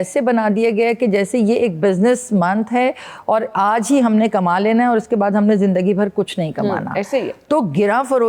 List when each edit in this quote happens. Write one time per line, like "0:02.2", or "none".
none